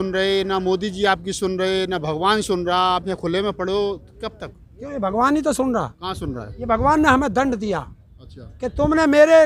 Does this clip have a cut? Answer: no; 0 cuts

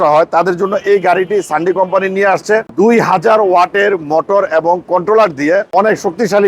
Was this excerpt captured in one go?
no; 2 cuts; at 2.7 s, 5.7 s

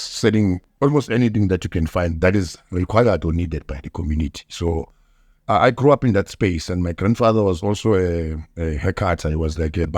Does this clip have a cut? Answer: no; 0 cuts

